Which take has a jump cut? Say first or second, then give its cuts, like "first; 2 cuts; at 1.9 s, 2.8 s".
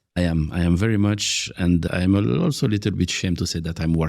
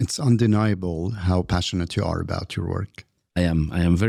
first; 1 cut; at 1.9 s